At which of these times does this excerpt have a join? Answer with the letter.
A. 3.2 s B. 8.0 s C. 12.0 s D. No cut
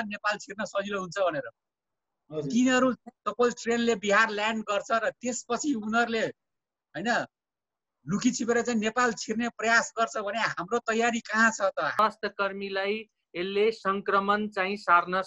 C